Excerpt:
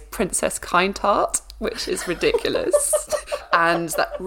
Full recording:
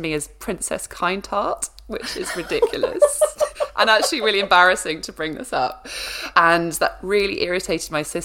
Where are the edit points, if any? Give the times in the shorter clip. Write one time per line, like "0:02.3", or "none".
0:03.3